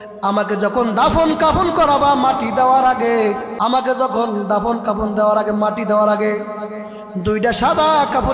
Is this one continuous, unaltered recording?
no; 1 cut; at 3.5 s

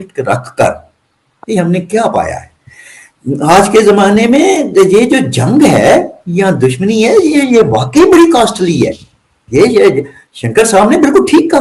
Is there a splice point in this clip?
no; 0 cuts

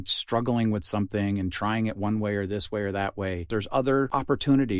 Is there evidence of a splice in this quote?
yes; 2 cuts; at 3.4 s, 4.1 s

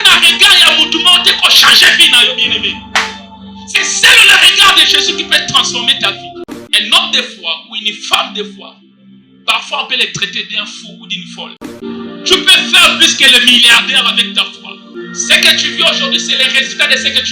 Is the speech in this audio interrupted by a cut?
yes; 3 cuts; at 6.4 s, 11.7 s, 14.8 s

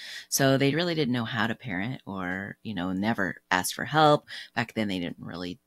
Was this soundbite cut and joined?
yes; 1 cut; at 4.2 s

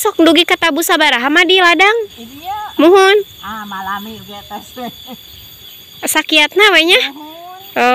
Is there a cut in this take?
no; 0 cuts

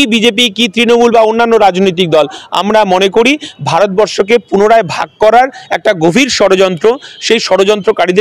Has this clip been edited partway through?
no; 0 cuts

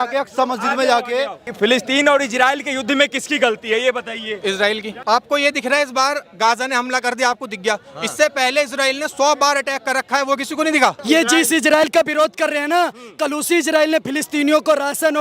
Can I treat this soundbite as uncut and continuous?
no; 3 cuts; at 1.4 s, 4.9 s, 11.0 s

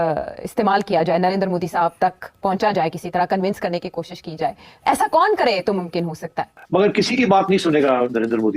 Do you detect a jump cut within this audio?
no; 0 cuts

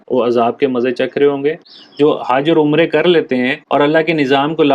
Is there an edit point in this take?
yes; 1 cut; at 1.6 s

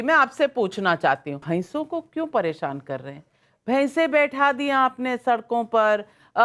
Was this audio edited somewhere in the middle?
yes; 1 cut; at 1.3 s

